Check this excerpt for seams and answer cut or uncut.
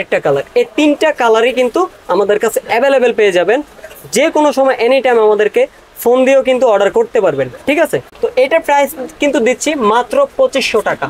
uncut